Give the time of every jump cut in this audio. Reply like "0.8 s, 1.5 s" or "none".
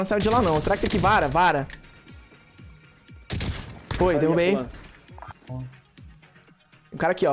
5.3 s